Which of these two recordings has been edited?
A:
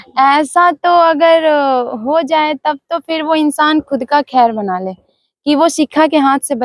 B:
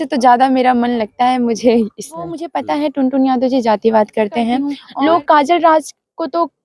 B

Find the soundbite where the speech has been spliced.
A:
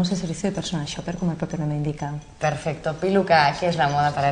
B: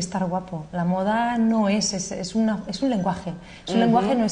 B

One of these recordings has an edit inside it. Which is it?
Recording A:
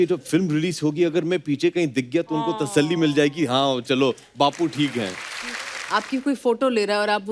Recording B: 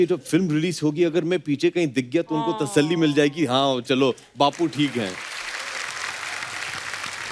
A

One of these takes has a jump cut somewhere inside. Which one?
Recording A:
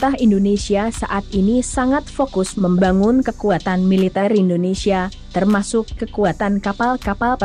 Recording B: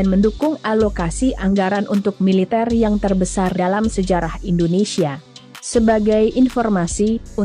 B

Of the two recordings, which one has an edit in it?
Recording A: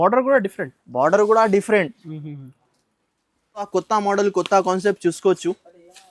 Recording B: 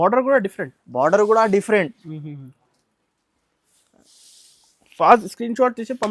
A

